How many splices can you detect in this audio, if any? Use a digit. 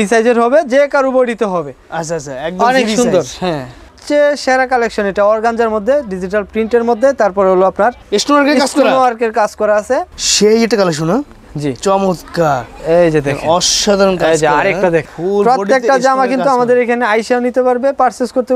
3